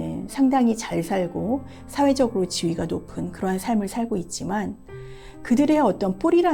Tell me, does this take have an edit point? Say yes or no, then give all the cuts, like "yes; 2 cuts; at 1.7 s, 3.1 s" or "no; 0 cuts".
no; 0 cuts